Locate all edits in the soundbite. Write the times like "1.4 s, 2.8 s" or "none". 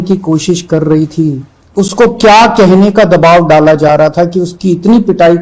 1.5 s